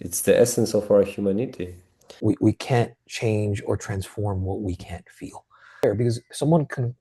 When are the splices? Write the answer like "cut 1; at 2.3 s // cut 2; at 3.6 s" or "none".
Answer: cut 1; at 2.1 s // cut 2; at 5.8 s